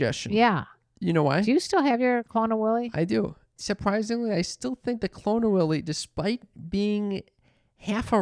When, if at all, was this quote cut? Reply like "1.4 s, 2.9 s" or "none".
3.6 s